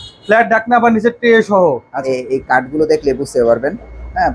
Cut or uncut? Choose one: cut